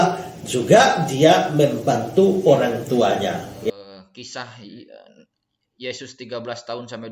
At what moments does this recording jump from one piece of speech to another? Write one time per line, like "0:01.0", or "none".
0:04.0